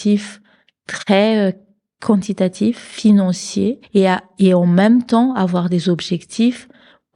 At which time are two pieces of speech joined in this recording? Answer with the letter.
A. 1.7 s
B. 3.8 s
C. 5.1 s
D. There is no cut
B